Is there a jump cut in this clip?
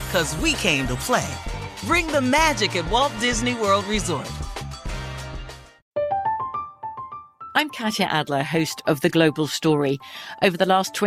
yes; 1 cut; at 5.8 s

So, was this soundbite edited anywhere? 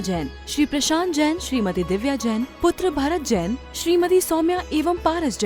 no; 0 cuts

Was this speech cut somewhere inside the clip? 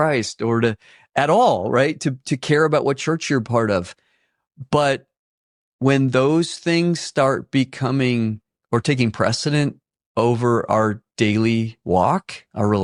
no; 0 cuts

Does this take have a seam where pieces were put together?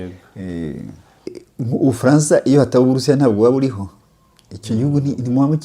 yes; 1 cut; at 1.3 s

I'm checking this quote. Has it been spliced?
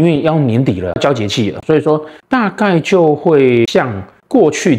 no; 0 cuts

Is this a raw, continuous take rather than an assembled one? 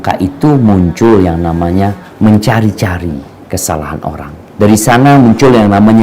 no; 1 cut; at 4.4 s

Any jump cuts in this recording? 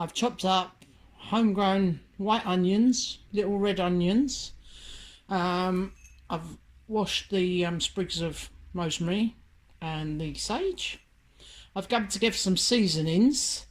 no; 0 cuts

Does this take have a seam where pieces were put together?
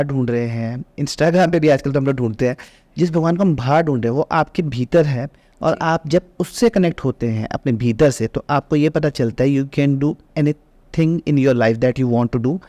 no; 0 cuts

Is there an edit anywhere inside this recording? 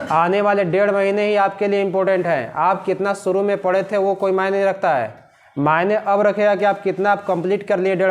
no; 0 cuts

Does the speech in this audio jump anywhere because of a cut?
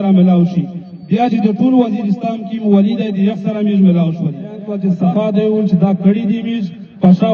yes; 1 cut; at 4.7 s

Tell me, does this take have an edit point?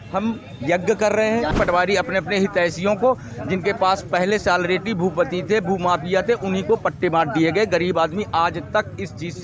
yes; 1 cut; at 1.5 s

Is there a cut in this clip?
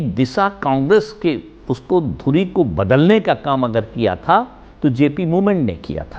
no; 0 cuts

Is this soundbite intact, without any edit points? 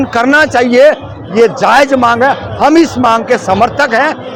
yes; 0 cuts

